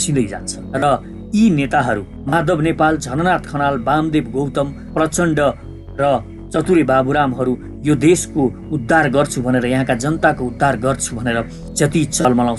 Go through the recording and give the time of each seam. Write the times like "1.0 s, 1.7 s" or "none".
11.6 s